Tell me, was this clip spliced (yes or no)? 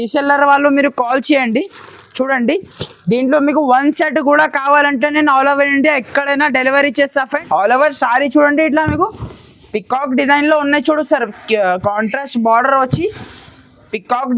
yes